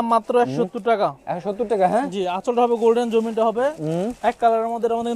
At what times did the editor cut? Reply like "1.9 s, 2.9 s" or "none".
none